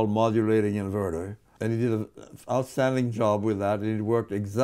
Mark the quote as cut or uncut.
cut